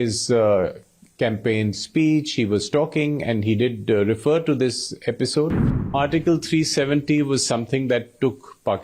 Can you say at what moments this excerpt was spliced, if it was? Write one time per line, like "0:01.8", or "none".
0:05.9

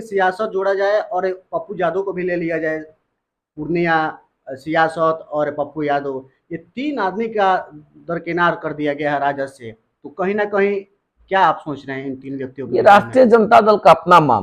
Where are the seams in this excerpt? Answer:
none

